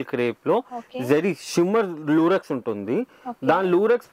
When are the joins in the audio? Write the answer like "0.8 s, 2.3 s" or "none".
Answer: none